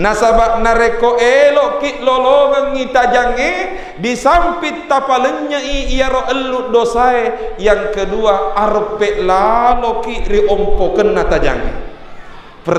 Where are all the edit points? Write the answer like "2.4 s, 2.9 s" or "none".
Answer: none